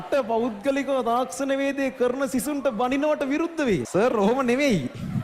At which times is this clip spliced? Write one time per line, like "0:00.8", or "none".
0:03.9